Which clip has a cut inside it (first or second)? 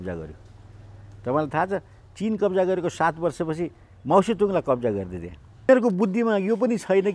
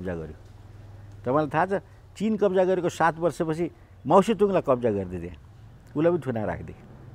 first